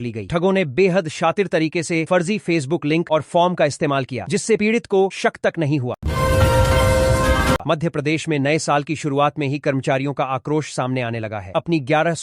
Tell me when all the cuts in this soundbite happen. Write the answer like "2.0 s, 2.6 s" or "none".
6.0 s, 7.6 s